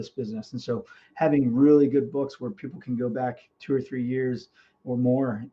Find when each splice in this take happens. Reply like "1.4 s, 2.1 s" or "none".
none